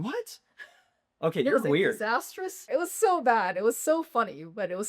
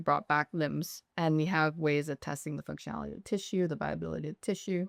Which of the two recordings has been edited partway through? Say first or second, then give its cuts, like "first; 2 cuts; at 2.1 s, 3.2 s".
first; 1 cut; at 2.5 s